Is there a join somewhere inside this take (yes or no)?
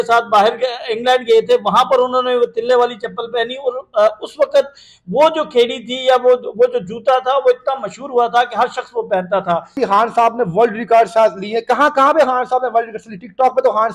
no